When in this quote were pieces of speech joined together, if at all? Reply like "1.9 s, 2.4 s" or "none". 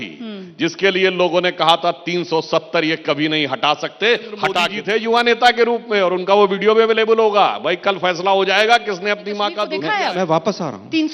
4.7 s, 9.7 s